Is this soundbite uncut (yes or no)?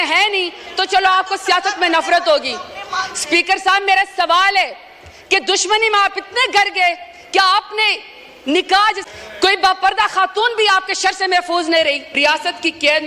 no